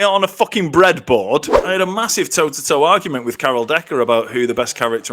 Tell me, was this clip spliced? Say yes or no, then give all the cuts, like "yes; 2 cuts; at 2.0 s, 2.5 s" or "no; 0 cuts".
yes; 1 cut; at 1.6 s